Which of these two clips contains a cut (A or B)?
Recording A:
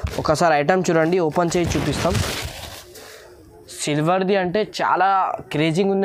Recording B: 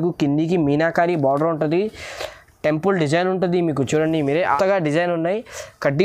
B